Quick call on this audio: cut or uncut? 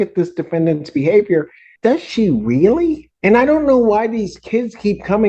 cut